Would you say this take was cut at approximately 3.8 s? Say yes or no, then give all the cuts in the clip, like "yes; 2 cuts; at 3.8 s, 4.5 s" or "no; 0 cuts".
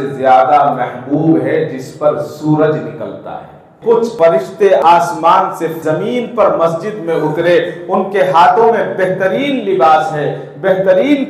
yes; 1 cut; at 3.8 s